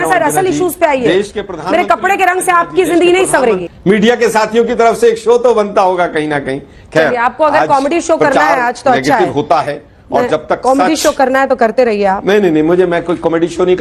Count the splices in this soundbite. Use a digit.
1